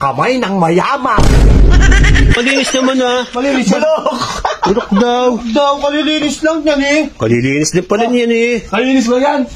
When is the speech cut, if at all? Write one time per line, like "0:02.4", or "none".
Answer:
0:01.2
0:02.4